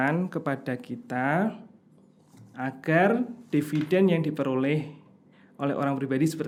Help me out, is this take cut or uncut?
uncut